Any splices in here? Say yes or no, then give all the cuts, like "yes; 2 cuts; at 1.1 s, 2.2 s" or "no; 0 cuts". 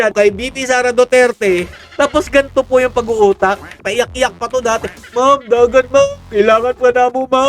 yes; 2 cuts; at 1.8 s, 3.8 s